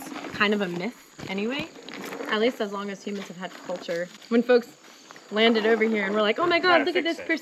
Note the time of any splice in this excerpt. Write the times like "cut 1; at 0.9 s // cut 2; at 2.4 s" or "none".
cut 1; at 4.1 s